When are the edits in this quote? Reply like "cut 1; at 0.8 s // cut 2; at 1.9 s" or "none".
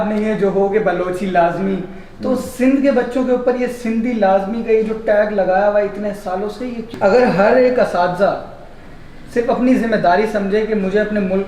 cut 1; at 6.9 s